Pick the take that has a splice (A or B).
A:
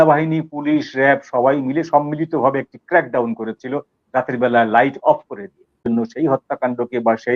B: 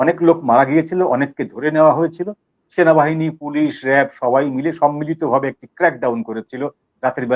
A